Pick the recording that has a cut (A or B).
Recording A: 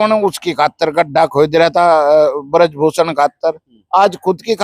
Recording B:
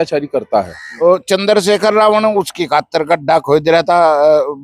B